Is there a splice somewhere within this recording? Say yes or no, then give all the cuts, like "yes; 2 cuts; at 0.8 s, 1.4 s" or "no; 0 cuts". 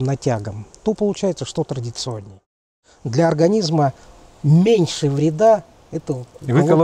yes; 1 cut; at 2.4 s